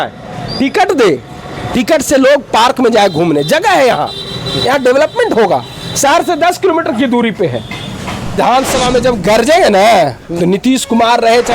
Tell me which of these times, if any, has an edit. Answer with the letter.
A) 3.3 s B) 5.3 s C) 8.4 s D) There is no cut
C